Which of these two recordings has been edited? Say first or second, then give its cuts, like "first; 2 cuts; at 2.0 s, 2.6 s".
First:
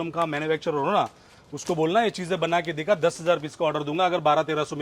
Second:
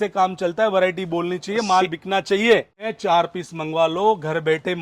second; 1 cut; at 2.8 s